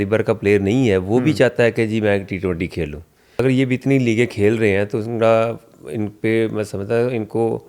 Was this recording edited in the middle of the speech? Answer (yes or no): yes